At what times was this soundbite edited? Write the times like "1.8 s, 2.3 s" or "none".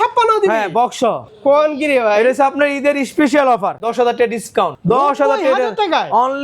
1.3 s, 3.9 s, 4.8 s